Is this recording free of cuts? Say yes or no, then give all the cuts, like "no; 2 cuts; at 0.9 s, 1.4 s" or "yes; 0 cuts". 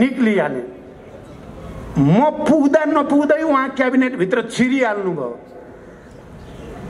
yes; 0 cuts